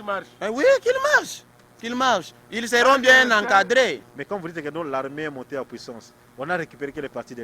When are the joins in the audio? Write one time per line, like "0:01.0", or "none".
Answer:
0:04.1